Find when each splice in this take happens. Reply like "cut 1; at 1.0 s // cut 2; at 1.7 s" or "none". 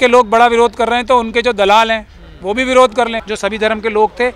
cut 1; at 3.2 s